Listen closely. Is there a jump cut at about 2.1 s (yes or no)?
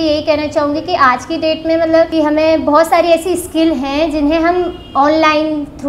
yes